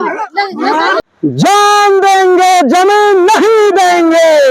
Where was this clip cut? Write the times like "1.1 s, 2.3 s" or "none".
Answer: 1.1 s